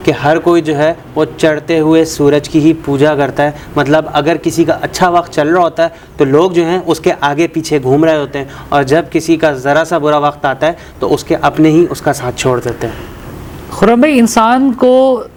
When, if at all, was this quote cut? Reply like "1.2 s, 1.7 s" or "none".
none